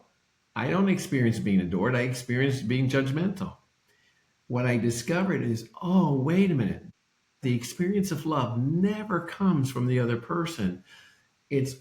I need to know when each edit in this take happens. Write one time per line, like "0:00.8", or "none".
0:07.4

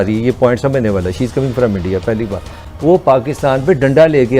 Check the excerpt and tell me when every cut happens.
0:02.6

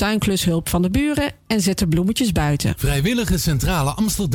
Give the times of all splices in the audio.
0:02.8

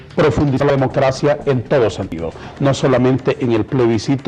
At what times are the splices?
0:03.1

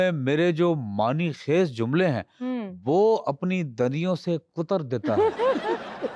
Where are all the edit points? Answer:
none

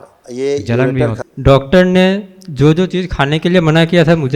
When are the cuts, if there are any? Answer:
0:01.2

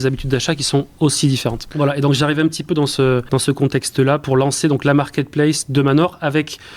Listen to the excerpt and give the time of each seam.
0:01.6
0:03.9

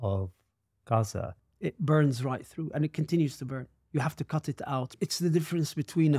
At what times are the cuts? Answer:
0:01.4
0:05.0

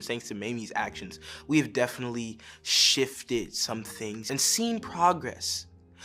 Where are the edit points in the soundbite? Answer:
0:04.3

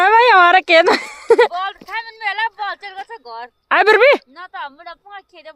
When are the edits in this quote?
none

